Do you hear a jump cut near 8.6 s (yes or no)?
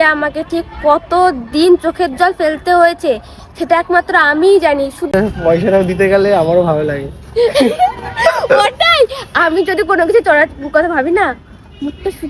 yes